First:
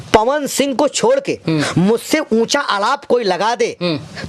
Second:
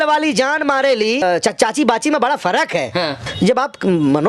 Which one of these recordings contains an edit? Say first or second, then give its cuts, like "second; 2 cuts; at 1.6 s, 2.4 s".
second; 2 cuts; at 1.2 s, 3.2 s